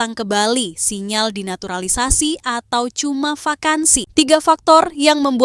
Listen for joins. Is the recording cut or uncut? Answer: cut